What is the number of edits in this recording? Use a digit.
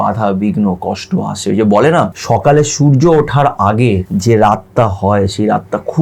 2